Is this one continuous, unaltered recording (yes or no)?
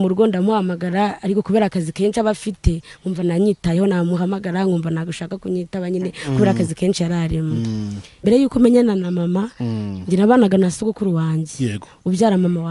no